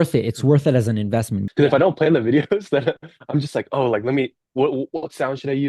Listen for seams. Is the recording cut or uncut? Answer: cut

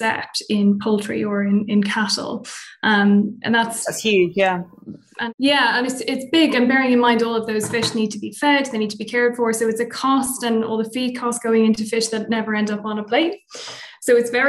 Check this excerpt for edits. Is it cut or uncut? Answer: uncut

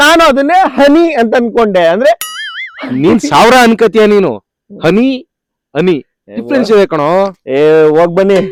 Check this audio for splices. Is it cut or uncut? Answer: uncut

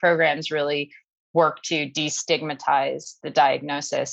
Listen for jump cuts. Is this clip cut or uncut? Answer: uncut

